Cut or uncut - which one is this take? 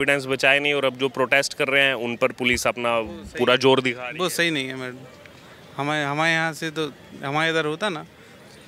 uncut